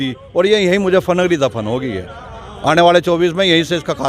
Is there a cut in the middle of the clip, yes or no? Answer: no